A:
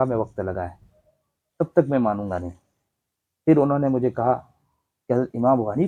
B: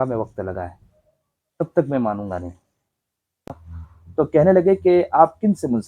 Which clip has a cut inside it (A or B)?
B